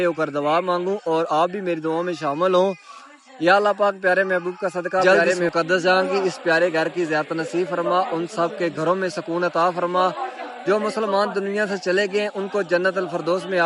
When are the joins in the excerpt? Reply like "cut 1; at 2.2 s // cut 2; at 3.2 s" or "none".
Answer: cut 1; at 5.0 s